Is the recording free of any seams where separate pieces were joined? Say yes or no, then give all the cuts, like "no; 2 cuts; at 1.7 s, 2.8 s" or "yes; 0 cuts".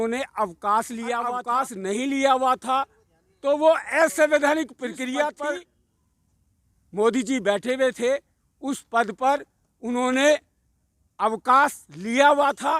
no; 2 cuts; at 1.4 s, 5.4 s